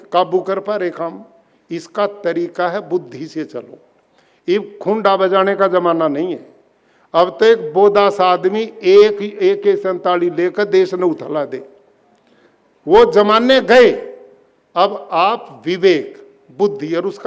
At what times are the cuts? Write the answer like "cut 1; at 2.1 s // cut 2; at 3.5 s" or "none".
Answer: none